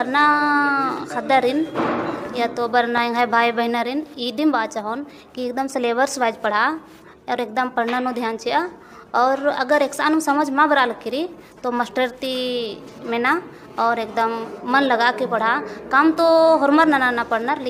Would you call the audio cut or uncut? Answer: uncut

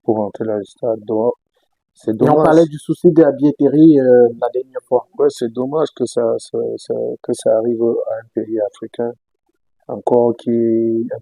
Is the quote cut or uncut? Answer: uncut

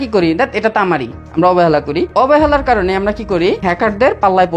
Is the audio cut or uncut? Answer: cut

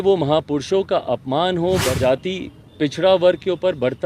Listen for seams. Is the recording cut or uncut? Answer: cut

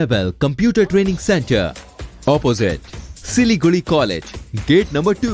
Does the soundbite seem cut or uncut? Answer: uncut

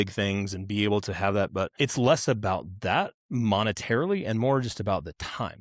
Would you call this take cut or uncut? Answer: cut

